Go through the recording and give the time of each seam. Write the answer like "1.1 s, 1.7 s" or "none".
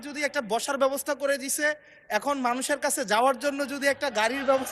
none